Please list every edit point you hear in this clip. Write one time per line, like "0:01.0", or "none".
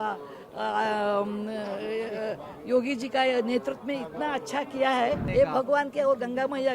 0:05.2